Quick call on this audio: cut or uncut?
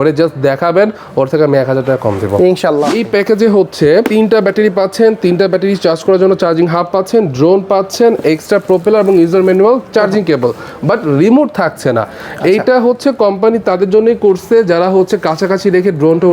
cut